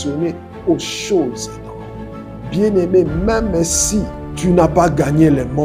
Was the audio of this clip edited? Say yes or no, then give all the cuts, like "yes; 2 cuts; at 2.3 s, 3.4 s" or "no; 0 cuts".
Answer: yes; 1 cut; at 4.2 s